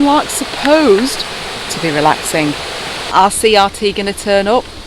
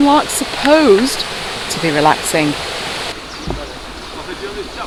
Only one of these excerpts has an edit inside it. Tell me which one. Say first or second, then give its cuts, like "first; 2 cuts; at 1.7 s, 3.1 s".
first; 1 cut; at 3.0 s